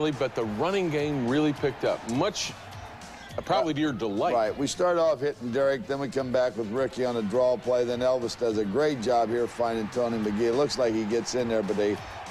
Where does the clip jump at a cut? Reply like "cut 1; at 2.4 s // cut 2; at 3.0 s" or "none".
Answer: cut 1; at 4.9 s